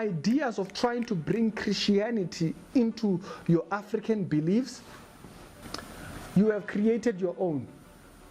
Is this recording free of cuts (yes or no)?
yes